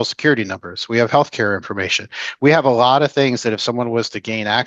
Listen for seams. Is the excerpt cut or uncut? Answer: uncut